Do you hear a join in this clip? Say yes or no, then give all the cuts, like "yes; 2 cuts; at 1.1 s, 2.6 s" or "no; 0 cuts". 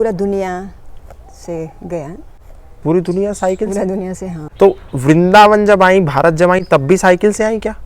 yes; 1 cut; at 4.4 s